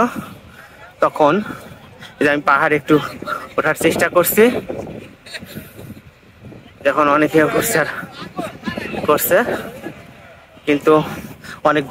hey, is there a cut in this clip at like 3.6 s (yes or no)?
no